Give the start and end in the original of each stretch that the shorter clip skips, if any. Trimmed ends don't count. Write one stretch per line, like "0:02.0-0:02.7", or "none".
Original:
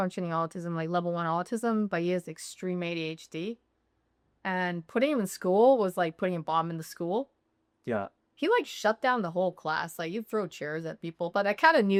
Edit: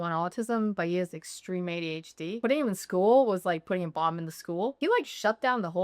0:03.5-0:04.9
0:07.3-0:08.4